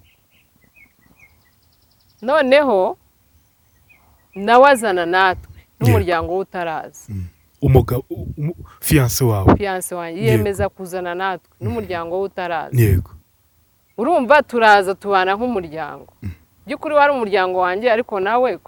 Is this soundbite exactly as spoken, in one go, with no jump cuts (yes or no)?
yes